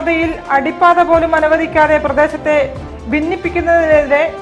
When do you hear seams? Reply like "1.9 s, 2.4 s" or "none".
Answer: none